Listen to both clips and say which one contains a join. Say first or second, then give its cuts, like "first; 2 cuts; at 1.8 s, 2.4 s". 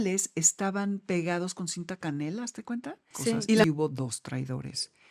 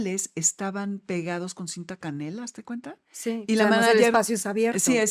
first; 1 cut; at 3.6 s